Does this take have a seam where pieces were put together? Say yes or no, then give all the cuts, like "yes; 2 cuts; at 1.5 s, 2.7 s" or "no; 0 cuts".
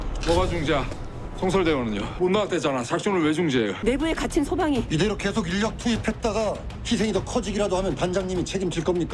yes; 2 cuts; at 2.1 s, 3.8 s